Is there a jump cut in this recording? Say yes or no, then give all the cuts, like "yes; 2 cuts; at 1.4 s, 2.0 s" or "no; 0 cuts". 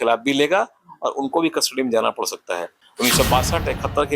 yes; 1 cut; at 2.8 s